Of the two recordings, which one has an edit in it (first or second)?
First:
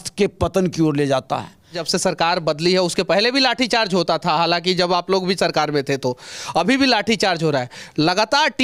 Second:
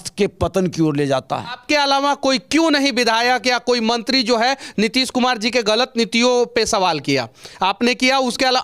second